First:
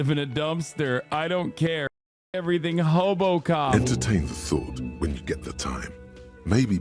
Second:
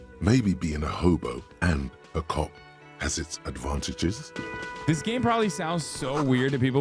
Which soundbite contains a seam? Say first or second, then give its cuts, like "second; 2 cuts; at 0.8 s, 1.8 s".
second; 1 cut; at 4.3 s